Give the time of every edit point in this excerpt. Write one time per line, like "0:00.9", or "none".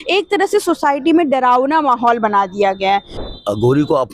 0:03.1